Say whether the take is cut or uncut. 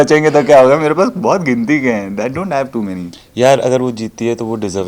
cut